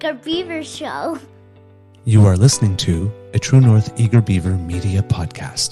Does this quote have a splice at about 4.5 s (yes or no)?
yes